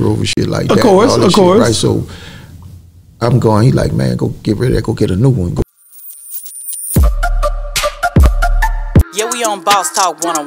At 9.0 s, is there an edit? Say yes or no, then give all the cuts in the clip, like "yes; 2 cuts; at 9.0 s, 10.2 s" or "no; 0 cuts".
no; 1 cut; at 5.6 s